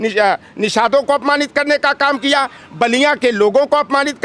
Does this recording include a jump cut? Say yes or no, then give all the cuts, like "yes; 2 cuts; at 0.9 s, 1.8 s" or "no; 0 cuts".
no; 0 cuts